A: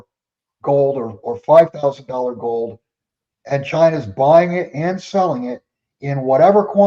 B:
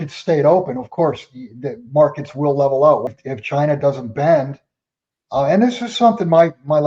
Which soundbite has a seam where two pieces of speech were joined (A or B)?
B